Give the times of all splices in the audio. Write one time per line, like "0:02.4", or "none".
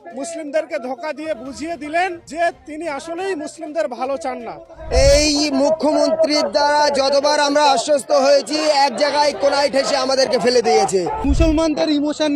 0:02.2
0:04.8
0:11.2